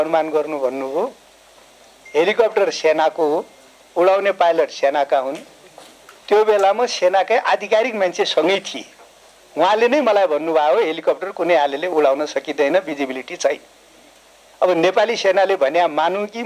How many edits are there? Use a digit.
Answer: 0